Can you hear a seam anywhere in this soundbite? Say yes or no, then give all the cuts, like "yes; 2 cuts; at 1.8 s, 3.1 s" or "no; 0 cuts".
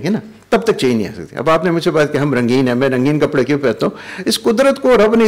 no; 0 cuts